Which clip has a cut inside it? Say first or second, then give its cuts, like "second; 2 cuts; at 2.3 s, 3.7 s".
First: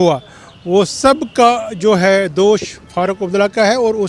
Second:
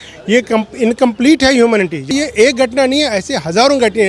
second; 1 cut; at 2.1 s